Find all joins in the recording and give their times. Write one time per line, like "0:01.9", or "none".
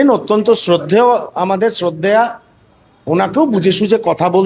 none

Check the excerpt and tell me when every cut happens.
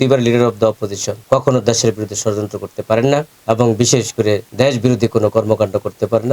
0:01.1
0:03.3
0:04.5

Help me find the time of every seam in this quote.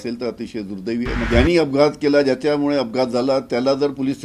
0:01.3

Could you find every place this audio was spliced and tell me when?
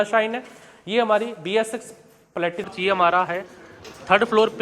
0:02.6

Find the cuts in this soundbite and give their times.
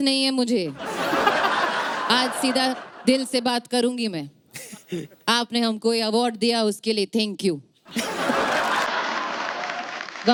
none

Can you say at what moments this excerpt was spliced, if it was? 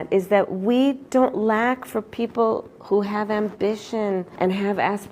0:01.0
0:04.3

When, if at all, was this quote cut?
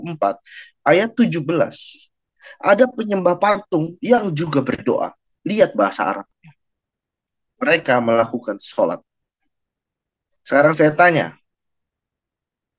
none

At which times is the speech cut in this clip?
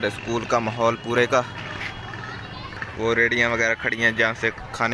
0:02.8

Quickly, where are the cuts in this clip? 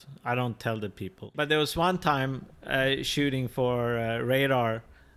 0:01.3

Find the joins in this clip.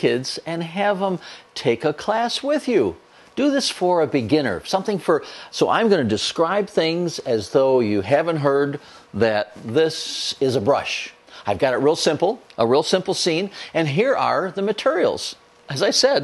0:10.5

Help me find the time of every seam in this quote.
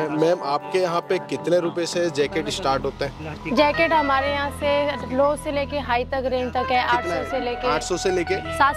none

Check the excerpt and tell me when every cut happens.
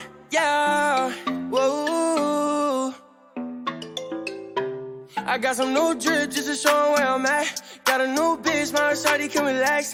none

